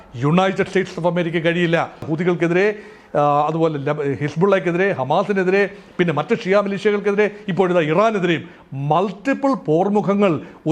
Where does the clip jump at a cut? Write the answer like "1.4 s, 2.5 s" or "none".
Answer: 2.1 s

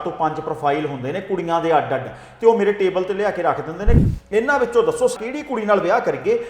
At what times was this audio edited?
4.0 s, 5.2 s

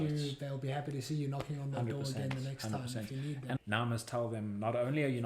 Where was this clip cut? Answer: 3.6 s

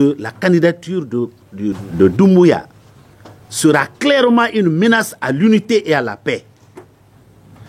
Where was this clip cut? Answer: 1.8 s

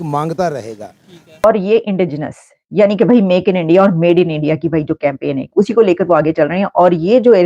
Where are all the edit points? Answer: 1.4 s

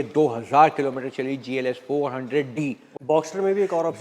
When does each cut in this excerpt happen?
2.9 s

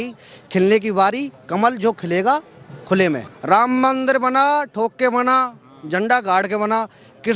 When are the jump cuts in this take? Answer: 3.3 s

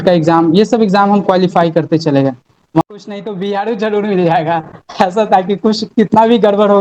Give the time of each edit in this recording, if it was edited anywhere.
2.8 s

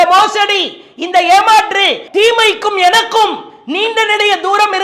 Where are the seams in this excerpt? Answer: 2.0 s

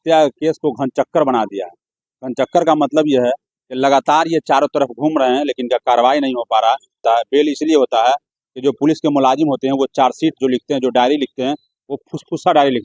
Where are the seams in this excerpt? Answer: 7.0 s

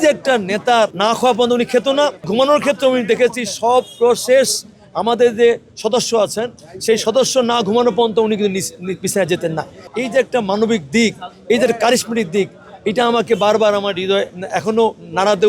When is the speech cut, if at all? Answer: 0.9 s, 2.3 s, 9.9 s

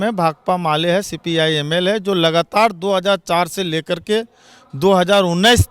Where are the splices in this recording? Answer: none

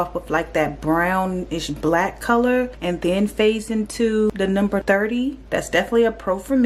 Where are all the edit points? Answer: 4.3 s

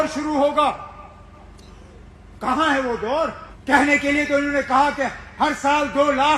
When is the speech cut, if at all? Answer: 3.5 s

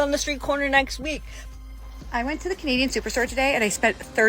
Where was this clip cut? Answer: 1.4 s

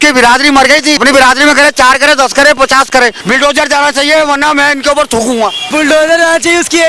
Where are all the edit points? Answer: 1.0 s, 3.2 s, 5.6 s

